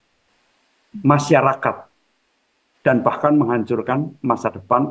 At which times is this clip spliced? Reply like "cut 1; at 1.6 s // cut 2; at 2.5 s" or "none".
none